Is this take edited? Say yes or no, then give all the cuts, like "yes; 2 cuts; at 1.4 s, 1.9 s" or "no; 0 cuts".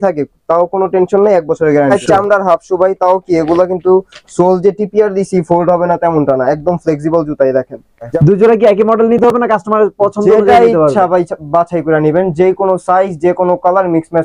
yes; 2 cuts; at 2.0 s, 8.1 s